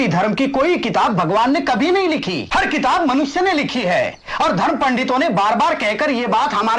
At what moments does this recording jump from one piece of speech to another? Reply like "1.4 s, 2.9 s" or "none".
2.4 s